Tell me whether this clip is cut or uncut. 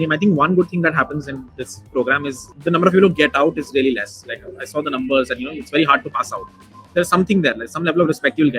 cut